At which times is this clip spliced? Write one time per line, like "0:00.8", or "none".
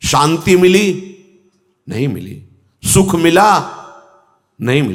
none